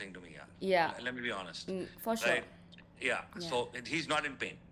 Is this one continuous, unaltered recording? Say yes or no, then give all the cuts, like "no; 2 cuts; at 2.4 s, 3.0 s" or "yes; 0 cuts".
yes; 0 cuts